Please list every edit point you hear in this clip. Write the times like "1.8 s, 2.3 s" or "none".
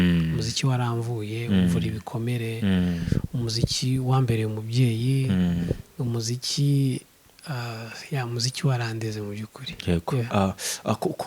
none